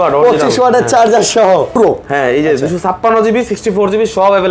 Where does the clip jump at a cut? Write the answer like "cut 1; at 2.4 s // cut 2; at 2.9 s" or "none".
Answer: cut 1; at 1.8 s